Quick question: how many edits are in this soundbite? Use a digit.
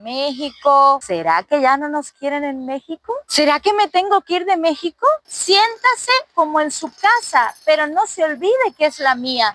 2